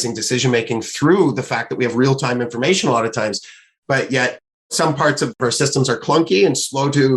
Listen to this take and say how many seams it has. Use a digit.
1